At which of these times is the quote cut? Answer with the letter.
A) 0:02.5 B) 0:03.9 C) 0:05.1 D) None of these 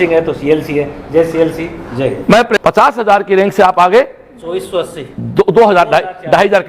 A